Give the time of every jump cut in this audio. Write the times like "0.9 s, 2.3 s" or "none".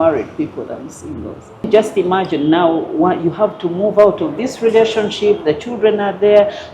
1.7 s